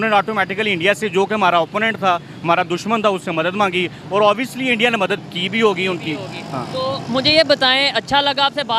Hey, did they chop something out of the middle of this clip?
no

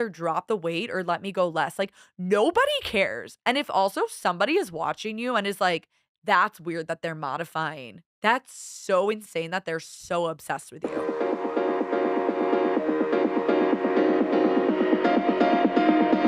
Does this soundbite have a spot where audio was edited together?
yes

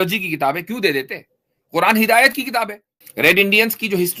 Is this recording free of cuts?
no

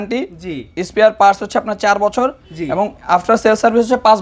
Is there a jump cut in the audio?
no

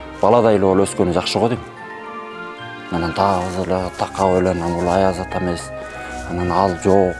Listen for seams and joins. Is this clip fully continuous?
yes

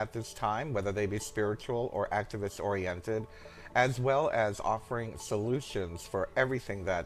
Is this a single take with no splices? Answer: no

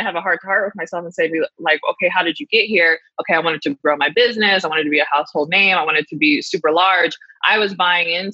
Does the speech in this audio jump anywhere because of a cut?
no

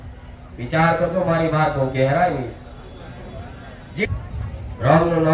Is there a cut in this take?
yes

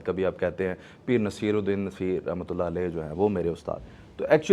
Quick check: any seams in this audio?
no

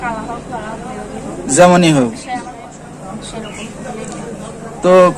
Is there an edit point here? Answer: yes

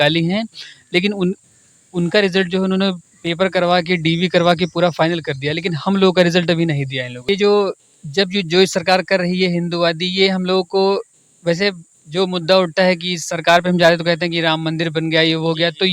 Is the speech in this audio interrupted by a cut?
yes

